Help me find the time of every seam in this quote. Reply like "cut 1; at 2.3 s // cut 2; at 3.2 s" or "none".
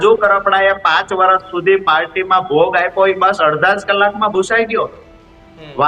none